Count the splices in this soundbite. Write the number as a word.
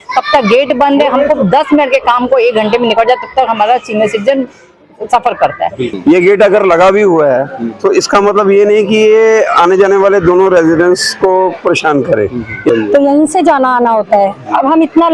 two